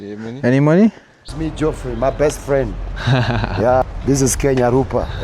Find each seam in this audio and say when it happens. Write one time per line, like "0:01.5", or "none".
0:01.3
0:03.8

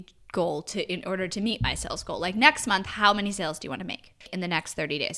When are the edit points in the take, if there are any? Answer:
0:04.2

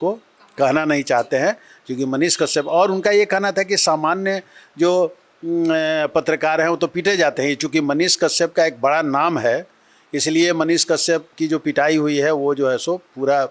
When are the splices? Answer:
none

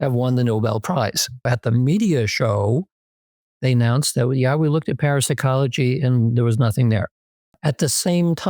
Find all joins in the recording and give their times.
0:01.5
0:07.6

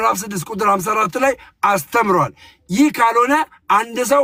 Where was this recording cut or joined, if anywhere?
none

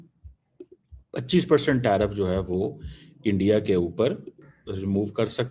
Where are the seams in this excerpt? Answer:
0:04.5

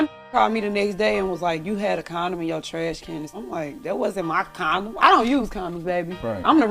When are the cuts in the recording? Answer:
0:03.3
0:05.0

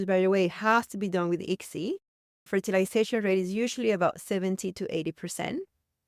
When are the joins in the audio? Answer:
0:02.1

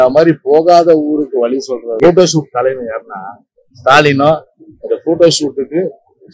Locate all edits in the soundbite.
0:01.9

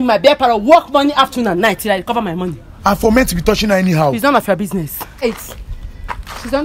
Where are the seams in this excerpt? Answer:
0:05.2

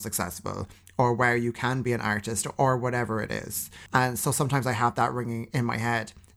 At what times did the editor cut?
0:03.8

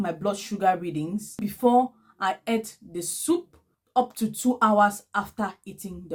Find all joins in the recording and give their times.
none

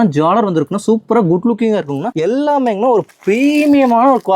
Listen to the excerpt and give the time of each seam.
0:02.1

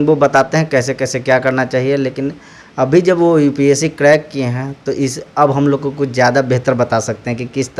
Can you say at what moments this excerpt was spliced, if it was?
none

